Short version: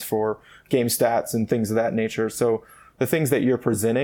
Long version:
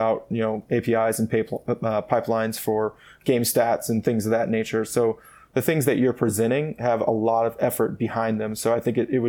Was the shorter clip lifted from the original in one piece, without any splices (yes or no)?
yes